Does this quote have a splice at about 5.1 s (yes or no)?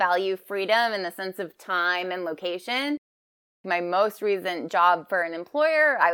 no